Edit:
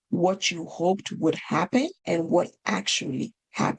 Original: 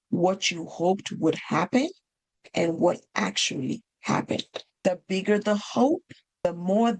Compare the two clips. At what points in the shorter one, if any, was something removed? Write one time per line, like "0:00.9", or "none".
0:02.0